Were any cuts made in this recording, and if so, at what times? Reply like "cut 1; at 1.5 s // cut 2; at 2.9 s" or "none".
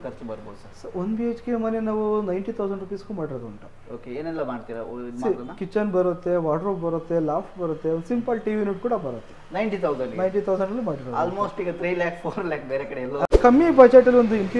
cut 1; at 13.3 s